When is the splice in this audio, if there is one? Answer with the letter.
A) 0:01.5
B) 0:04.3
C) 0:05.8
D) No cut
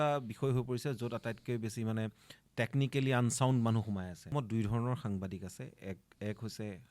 B